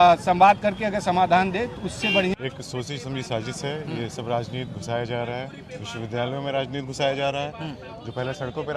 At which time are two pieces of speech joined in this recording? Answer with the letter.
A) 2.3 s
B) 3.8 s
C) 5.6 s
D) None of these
A